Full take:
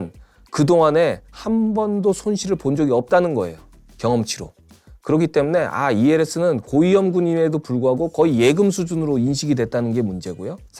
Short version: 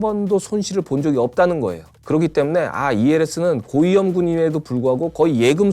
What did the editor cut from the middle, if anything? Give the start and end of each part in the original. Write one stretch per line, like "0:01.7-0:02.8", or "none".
0:03.6-0:04.9